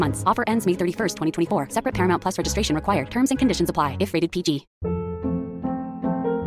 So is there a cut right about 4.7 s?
yes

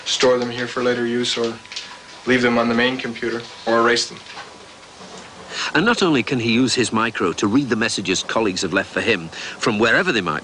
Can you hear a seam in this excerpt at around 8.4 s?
no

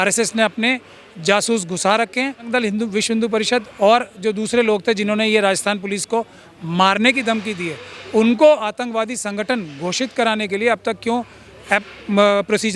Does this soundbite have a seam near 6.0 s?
no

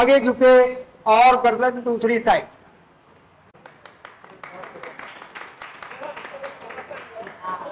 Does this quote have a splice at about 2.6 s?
no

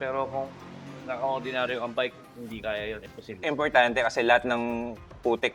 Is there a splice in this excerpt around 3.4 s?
yes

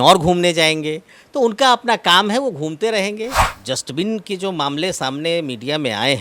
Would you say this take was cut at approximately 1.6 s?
no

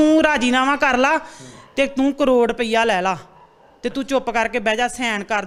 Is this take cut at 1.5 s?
no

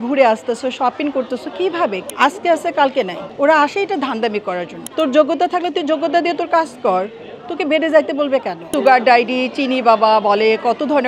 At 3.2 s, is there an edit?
yes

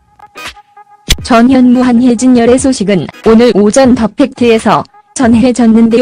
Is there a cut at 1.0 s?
no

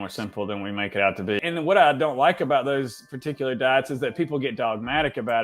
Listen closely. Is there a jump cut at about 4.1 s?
no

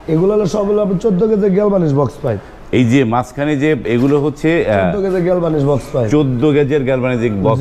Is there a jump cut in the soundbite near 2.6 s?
no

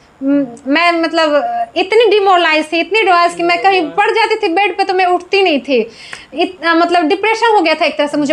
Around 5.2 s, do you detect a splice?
no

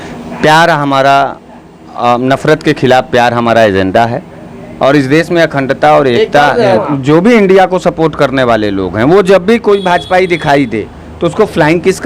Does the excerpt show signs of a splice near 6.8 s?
yes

